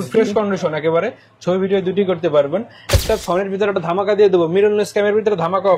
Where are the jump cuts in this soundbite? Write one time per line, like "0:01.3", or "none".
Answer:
0:03.0